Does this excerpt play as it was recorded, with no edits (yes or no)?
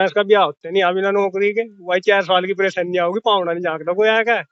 yes